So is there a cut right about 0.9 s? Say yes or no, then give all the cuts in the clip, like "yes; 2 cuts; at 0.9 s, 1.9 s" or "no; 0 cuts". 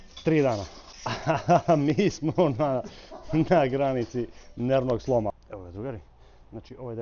no; 1 cut; at 5.4 s